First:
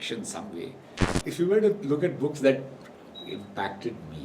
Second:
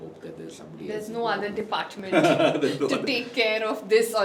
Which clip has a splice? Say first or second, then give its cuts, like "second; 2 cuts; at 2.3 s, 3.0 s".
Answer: first; 1 cut; at 1.2 s